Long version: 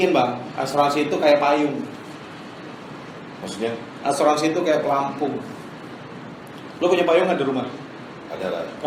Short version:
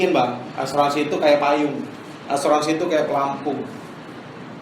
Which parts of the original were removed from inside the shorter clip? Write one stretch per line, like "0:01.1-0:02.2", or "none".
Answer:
0:02.1-0:03.9